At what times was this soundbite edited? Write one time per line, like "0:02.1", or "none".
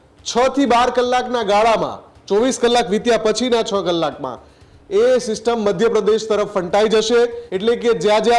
0:07.5